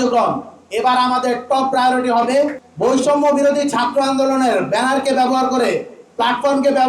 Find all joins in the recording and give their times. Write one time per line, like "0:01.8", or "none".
0:02.6

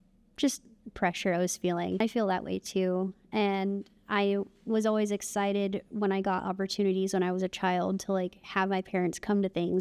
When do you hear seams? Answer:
0:02.0

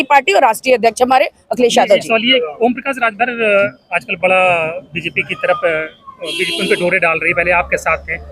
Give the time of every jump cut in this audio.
0:02.3

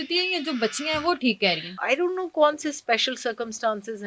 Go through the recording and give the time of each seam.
0:01.7

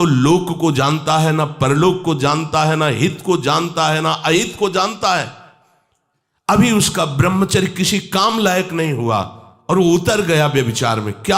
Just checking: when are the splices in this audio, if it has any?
none

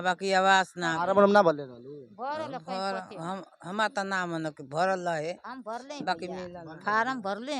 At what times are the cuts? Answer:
none

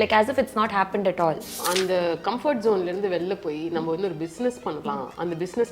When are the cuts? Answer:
0:01.6

